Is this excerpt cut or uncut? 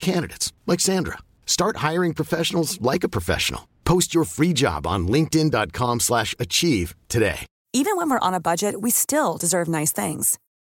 cut